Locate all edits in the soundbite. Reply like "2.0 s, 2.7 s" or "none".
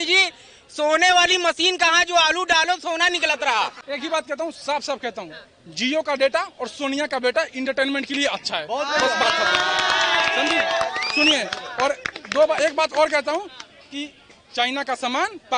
3.8 s